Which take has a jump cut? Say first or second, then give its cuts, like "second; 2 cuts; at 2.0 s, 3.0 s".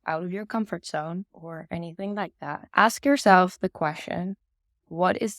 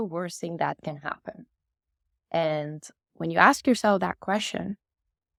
first; 2 cuts; at 1.4 s, 2.6 s